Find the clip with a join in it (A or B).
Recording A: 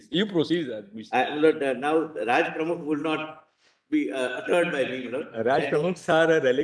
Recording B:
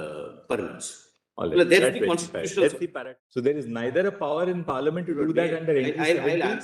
B